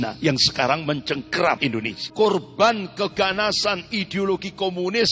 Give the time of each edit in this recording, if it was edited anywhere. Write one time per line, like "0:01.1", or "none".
0:01.7

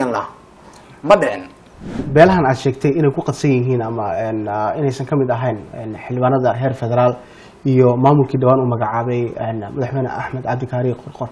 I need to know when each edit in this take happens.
0:02.0

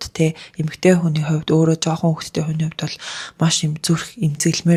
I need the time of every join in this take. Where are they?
none

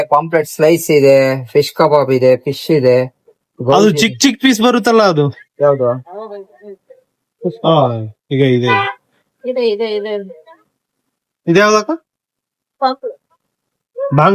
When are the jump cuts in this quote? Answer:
none

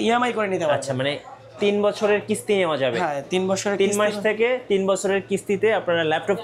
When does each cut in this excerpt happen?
none

